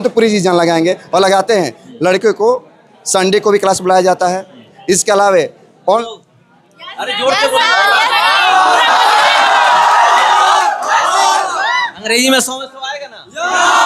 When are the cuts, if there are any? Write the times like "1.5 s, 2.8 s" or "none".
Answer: 6.0 s